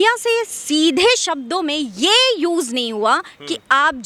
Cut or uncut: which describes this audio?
uncut